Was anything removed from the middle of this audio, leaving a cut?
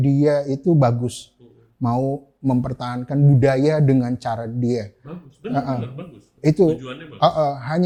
no; 0 cuts

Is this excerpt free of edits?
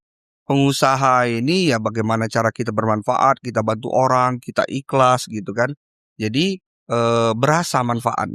yes; 0 cuts

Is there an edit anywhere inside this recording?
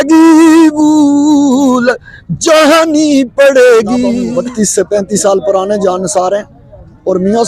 yes; 1 cut; at 4.2 s

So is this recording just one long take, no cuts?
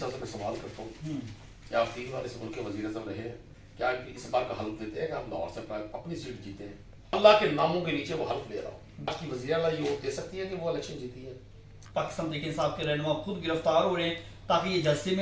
no; 3 cuts; at 7.1 s, 9.1 s, 11.8 s

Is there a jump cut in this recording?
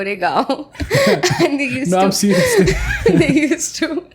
no; 0 cuts

